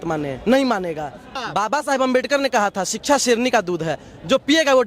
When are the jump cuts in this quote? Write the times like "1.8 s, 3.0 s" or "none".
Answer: 1.4 s